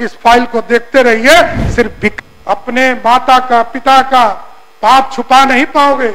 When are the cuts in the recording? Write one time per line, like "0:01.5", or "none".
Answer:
0:02.1